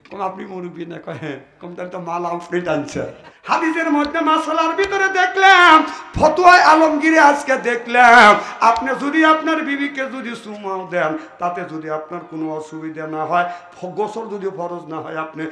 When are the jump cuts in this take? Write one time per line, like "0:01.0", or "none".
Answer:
0:03.3